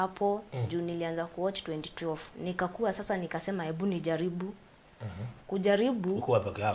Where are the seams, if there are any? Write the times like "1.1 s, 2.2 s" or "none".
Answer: 2.3 s